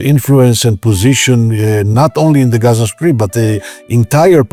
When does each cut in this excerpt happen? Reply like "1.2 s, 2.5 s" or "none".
none